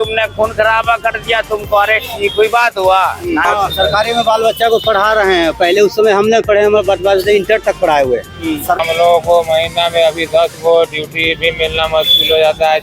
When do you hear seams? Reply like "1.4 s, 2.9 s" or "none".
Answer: 3.5 s, 8.8 s